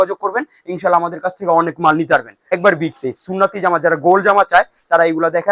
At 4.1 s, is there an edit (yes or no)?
no